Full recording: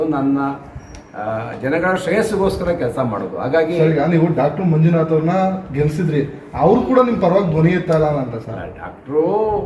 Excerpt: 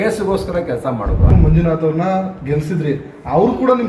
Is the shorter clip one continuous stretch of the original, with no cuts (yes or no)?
no